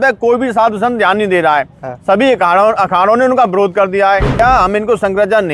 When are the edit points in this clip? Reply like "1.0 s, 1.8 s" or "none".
4.4 s